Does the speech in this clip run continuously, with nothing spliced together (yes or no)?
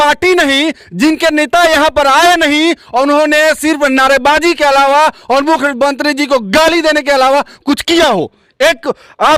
yes